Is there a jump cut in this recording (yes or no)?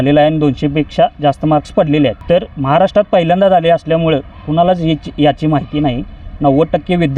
yes